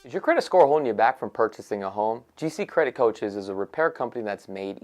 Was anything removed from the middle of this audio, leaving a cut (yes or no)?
yes